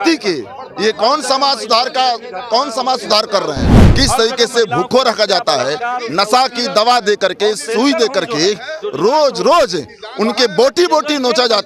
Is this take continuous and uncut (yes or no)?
no